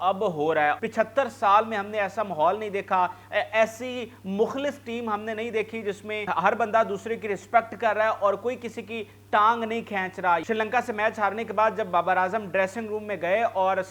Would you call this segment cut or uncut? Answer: cut